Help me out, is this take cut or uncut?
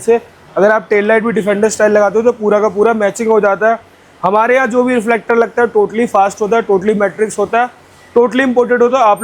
uncut